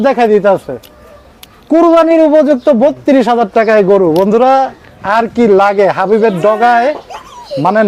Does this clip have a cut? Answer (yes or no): no